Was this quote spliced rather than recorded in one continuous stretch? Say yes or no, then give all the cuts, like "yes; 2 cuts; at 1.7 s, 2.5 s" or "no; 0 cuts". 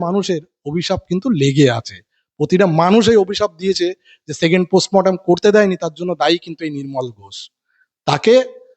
no; 0 cuts